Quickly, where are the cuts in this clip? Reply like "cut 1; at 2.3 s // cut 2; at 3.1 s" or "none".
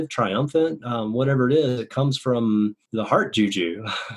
cut 1; at 2.8 s